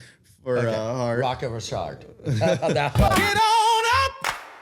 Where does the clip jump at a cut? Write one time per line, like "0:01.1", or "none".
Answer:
0:03.2

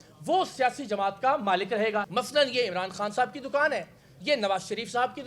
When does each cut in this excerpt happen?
0:02.1

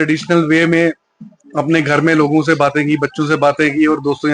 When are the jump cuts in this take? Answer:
none

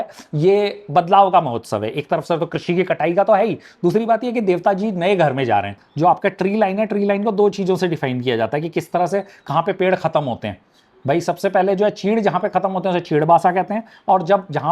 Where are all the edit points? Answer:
0:05.8

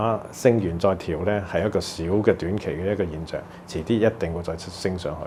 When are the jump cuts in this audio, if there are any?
none

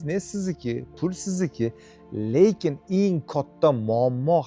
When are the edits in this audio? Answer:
none

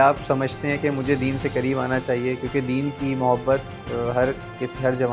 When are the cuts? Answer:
none

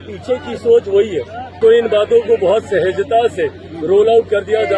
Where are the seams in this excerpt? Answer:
0:01.4

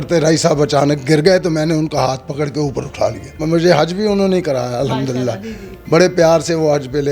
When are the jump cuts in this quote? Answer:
0:03.4

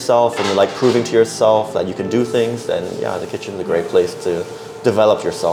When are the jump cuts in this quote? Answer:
none

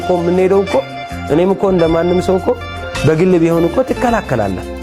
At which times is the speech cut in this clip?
none

